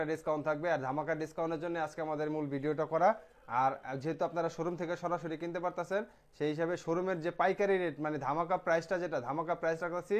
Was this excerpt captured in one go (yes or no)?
yes